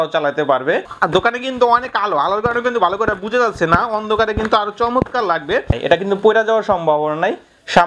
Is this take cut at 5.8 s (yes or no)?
yes